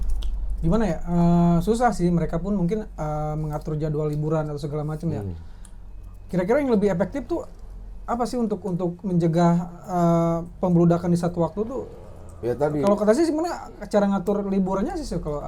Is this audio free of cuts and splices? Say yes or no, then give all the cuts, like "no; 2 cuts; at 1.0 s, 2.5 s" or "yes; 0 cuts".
yes; 0 cuts